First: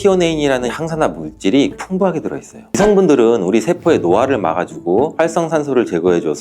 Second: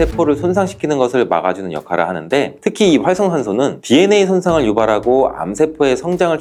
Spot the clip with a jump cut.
first; 1 cut; at 2.8 s

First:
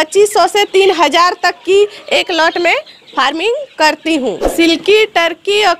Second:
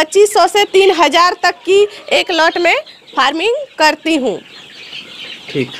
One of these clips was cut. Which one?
first; 1 cut; at 4.5 s

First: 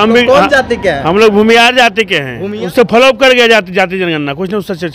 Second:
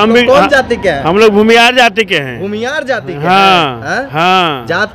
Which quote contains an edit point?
first; 1 cut; at 2.7 s

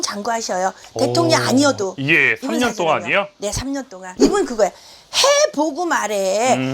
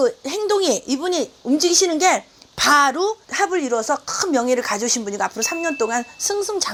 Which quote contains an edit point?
first; 1 cut; at 4.2 s

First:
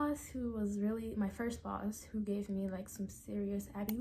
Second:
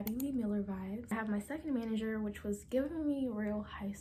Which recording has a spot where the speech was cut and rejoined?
second; 1 cut; at 1.1 s

